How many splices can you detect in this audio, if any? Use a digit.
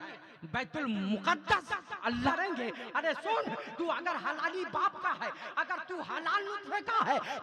1